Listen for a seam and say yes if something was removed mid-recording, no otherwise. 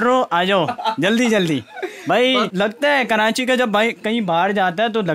yes